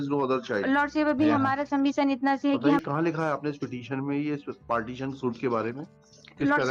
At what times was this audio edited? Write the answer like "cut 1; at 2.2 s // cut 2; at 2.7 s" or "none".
cut 1; at 2.8 s